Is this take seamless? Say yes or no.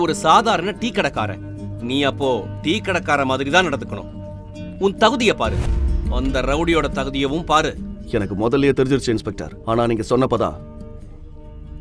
yes